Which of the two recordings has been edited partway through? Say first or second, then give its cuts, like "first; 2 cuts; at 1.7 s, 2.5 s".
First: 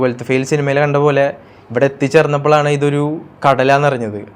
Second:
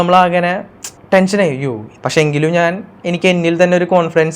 second; 1 cut; at 1.9 s